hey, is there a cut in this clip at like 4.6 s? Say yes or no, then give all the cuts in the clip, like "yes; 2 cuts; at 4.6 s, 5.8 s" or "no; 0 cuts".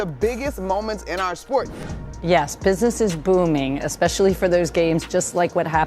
no; 1 cut; at 1.7 s